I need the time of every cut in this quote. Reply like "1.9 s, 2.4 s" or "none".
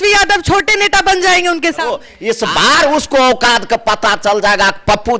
2.1 s